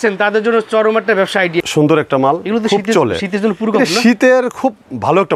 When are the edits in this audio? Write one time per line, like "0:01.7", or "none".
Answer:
0:01.6